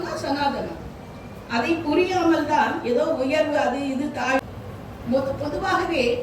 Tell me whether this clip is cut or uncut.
cut